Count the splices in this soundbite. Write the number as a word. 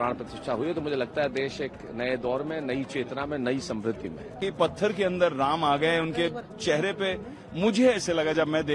one